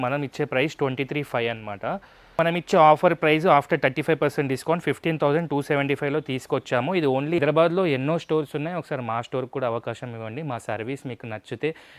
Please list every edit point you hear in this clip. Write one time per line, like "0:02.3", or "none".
0:02.4
0:07.4